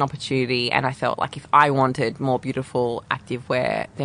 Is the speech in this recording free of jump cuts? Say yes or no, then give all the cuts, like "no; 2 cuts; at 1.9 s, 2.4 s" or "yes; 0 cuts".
no; 1 cut; at 3.1 s